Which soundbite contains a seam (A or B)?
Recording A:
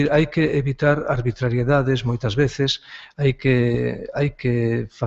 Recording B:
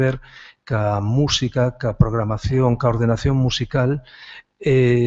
B